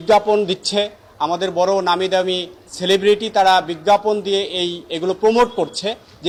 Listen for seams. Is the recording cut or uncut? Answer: uncut